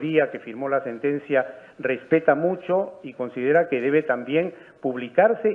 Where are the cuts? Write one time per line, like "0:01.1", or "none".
0:03.0